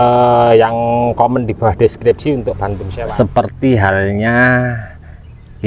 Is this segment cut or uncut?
cut